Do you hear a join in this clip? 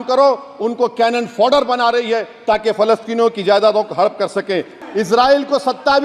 yes; 1 cut; at 4.8 s

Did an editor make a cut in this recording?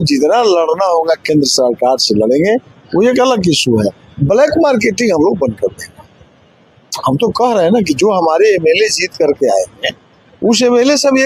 no; 0 cuts

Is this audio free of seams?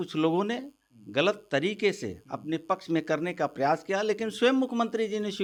yes; 0 cuts

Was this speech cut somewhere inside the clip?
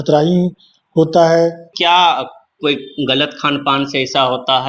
yes; 1 cut; at 1.7 s

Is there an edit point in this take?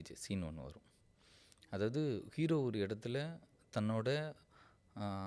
no; 0 cuts

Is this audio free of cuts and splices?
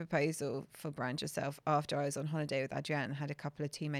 yes; 0 cuts

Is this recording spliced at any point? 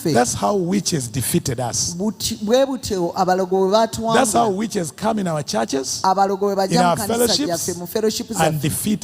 no; 0 cuts

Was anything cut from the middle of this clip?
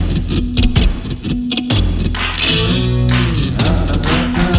no; 0 cuts

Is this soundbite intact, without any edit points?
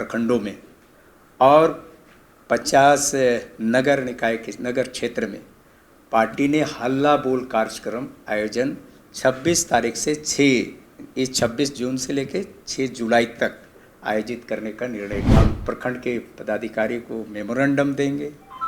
no; 1 cut; at 15.4 s

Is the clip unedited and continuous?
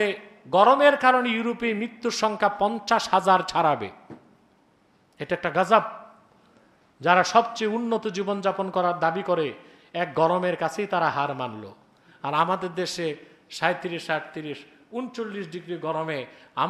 yes; 0 cuts

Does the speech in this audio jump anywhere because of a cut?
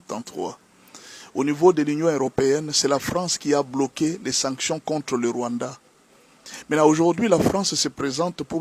no; 0 cuts

